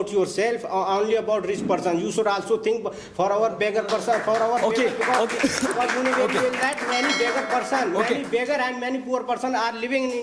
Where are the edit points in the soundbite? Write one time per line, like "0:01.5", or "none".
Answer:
none